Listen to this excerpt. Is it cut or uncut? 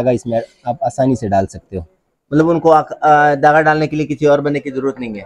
uncut